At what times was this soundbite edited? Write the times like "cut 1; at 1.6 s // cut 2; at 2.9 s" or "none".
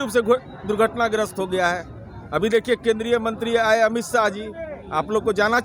none